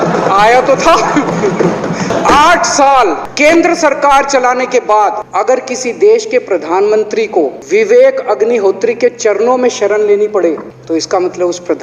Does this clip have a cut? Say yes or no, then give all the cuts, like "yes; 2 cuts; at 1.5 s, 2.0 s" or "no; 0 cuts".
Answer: yes; 5 cuts; at 2.1 s, 3.2 s, 5.2 s, 7.6 s, 10.7 s